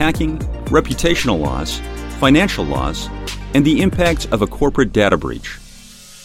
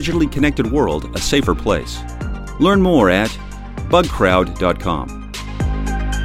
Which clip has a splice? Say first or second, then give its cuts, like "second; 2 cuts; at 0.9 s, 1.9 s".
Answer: second; 1 cut; at 5.3 s